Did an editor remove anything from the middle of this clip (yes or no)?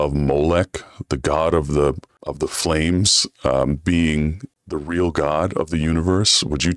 no